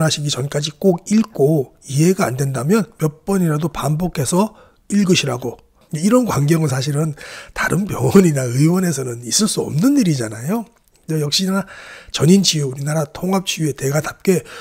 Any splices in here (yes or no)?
yes